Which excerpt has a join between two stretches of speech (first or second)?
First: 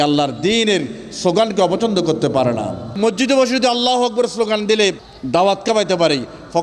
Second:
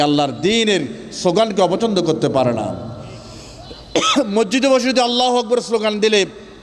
first